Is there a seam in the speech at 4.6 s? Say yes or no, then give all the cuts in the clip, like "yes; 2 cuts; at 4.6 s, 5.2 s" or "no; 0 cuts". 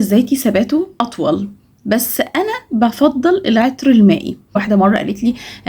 yes; 2 cuts; at 1.0 s, 4.6 s